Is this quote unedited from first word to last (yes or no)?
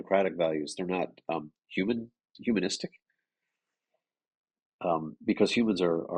yes